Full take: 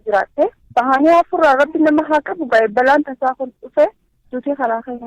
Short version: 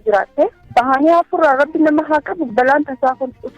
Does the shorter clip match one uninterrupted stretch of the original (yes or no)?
no